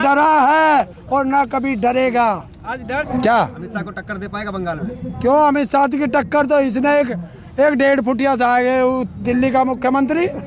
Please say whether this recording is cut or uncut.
cut